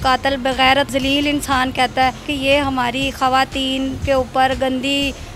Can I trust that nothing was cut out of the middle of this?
no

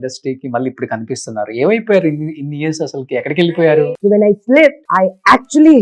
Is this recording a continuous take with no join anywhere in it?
no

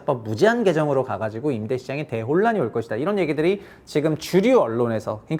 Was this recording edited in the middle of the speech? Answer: no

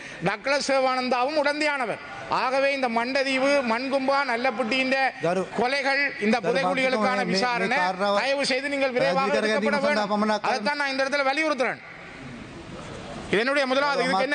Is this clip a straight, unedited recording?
yes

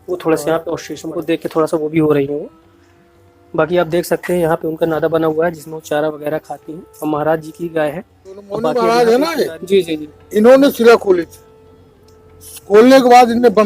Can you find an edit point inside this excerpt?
yes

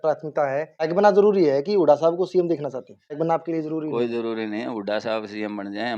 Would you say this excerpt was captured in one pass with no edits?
no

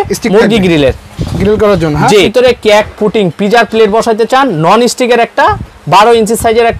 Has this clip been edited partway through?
yes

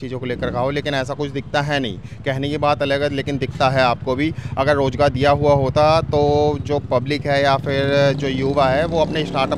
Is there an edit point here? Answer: no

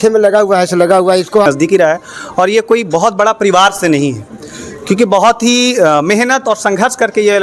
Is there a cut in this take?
yes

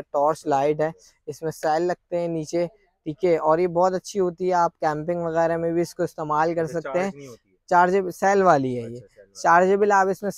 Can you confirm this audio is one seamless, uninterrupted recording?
yes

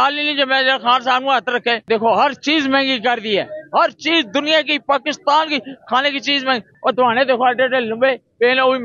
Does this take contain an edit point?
yes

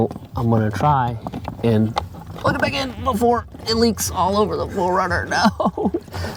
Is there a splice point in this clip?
no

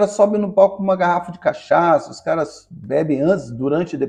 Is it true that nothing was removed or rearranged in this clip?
yes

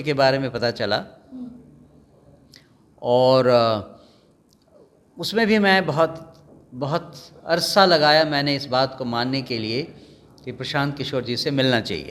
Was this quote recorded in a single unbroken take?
yes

